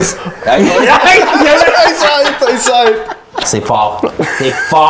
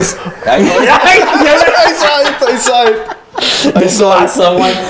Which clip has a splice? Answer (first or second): first